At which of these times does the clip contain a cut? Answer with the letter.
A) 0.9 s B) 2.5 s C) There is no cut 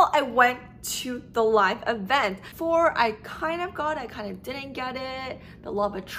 B